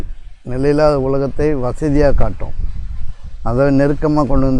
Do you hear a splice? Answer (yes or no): no